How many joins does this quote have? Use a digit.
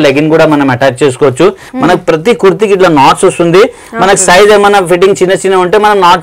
1